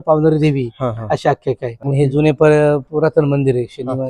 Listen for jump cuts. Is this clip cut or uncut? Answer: cut